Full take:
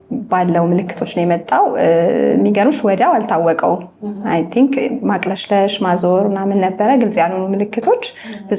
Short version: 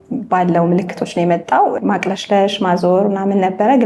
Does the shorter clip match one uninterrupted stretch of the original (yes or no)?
no